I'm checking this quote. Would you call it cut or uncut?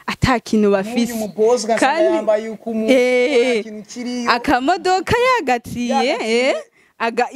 uncut